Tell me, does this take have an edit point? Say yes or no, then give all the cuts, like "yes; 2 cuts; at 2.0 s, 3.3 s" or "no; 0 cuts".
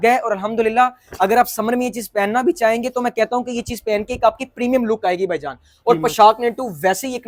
no; 0 cuts